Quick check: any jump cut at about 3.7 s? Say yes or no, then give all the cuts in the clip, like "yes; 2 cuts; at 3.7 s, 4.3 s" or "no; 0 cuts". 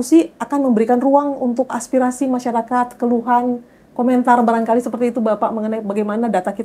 no; 1 cut; at 1.7 s